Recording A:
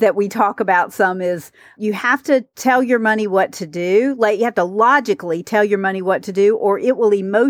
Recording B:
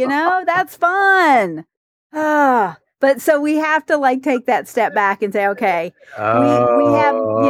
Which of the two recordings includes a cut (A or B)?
A